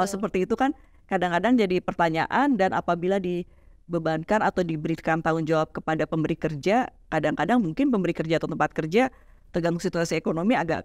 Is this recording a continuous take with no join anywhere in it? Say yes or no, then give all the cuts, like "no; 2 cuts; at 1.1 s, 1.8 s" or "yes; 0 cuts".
yes; 0 cuts